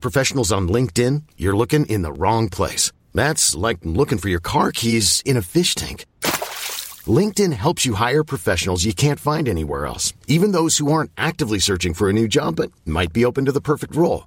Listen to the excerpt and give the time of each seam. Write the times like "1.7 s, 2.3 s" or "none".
none